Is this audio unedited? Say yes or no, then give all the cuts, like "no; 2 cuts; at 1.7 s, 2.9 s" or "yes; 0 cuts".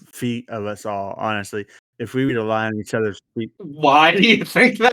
no; 1 cut; at 3.7 s